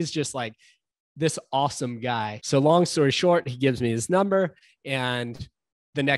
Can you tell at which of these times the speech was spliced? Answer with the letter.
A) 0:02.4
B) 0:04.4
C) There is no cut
A